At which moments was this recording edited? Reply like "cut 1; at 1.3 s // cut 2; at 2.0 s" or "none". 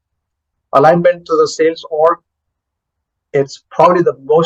none